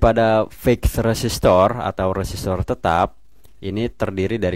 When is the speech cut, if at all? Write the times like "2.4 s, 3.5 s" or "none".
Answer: none

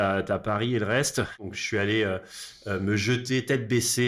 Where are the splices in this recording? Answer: 1.4 s

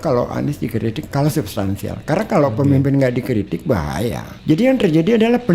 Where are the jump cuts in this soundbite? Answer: 1.0 s, 4.3 s

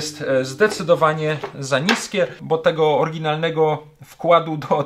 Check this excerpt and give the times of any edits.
2.4 s

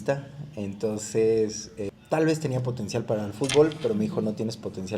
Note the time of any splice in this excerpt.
1.8 s

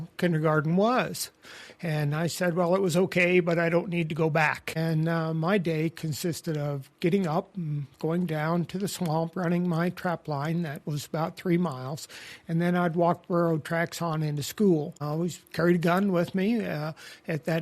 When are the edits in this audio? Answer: 4.7 s, 15.0 s

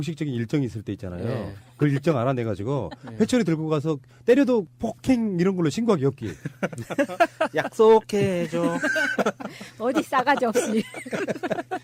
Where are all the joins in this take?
none

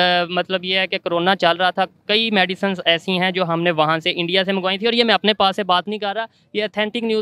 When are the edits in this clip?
none

